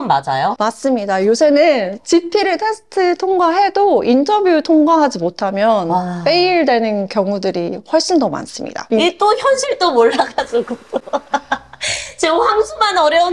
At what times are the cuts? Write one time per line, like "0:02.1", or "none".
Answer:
0:08.8